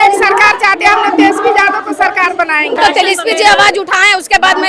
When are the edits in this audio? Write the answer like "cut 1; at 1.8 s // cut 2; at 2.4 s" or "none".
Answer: cut 1; at 2.8 s

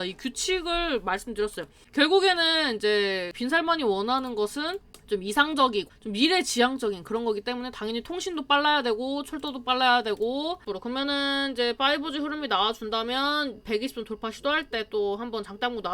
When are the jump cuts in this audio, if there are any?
cut 1; at 1.7 s // cut 2; at 3.3 s // cut 3; at 4.9 s // cut 4; at 6.0 s // cut 5; at 10.7 s

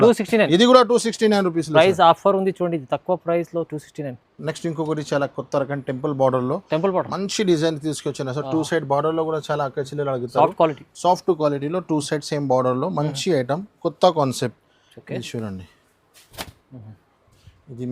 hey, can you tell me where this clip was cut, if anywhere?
none

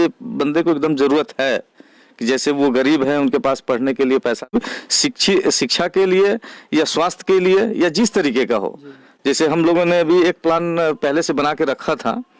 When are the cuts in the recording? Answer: cut 1; at 4.5 s

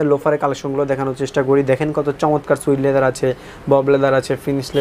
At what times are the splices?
none

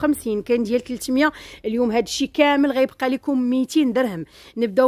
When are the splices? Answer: none

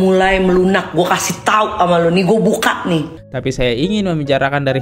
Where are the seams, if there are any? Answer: cut 1; at 3.2 s

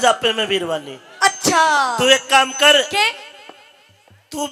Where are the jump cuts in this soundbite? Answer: none

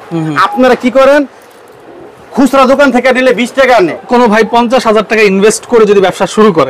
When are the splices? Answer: cut 1; at 4.0 s

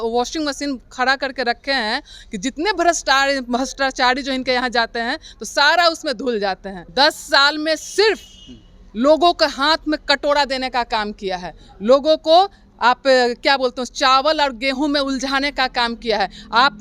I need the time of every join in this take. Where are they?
cut 1; at 6.7 s

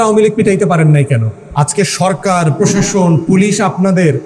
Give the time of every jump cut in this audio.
cut 1; at 1.4 s

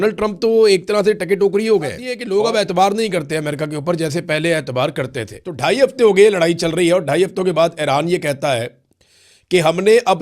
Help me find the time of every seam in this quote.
cut 1; at 2.1 s // cut 2; at 5.4 s

